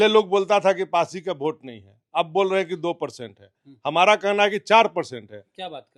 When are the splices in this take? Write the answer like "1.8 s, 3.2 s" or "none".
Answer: none